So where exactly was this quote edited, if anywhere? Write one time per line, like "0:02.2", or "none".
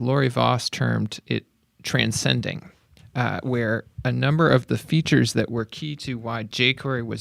none

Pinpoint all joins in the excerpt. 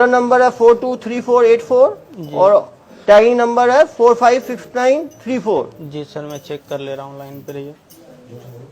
none

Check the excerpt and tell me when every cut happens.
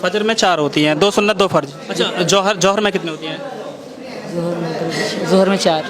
0:01.8

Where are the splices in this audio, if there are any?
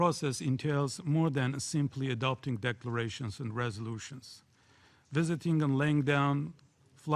0:03.1

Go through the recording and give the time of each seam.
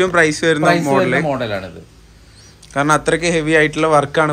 none

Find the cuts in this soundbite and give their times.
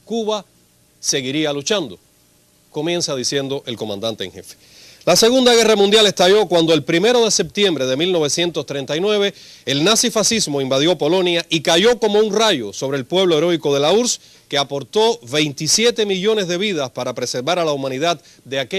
none

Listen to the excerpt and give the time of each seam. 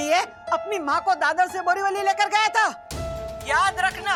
none

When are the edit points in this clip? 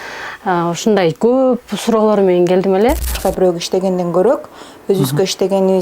0:03.2

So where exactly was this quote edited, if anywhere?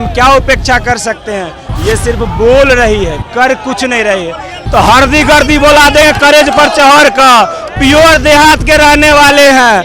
0:04.6

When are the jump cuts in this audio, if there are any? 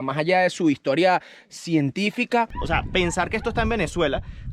0:02.6

